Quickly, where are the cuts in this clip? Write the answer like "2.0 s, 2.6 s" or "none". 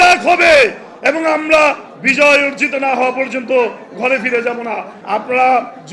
4.9 s